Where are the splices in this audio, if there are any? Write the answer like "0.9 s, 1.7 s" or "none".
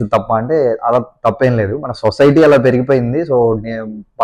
none